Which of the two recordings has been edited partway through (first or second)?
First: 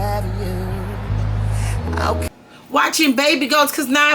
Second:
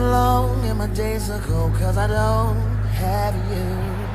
first